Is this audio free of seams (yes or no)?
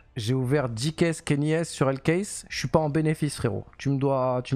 yes